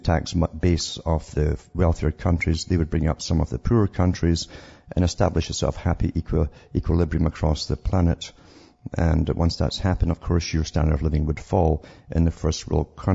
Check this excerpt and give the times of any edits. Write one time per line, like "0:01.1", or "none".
0:02.4

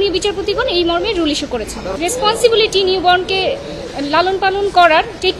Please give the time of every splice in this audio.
0:01.9

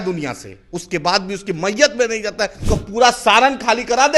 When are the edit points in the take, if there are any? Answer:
0:02.6

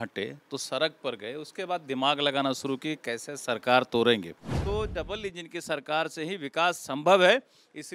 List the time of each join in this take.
0:04.5

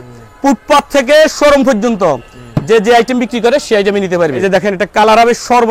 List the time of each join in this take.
0:04.4

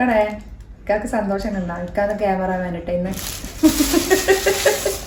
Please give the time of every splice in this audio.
none

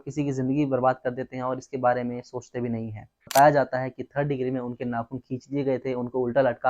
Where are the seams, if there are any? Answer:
0:03.1

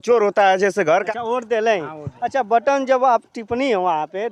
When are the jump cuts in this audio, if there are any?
0:01.1

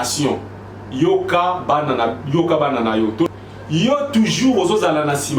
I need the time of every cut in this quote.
0:03.3

